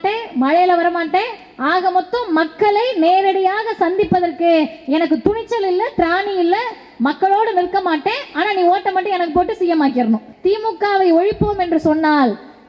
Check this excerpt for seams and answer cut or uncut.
cut